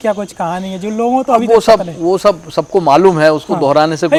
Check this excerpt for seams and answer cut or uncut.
uncut